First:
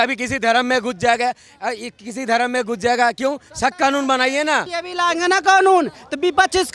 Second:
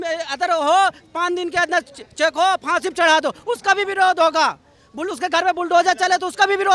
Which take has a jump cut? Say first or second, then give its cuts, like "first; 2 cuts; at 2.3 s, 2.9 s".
first; 1 cut; at 4.8 s